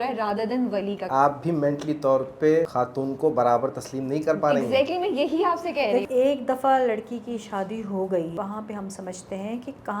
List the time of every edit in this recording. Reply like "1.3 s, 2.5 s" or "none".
1.1 s, 2.7 s, 6.0 s, 8.3 s